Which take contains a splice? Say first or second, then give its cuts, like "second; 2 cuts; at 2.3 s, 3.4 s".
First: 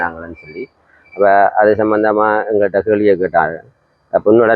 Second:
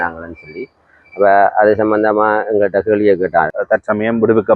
second; 1 cut; at 3.6 s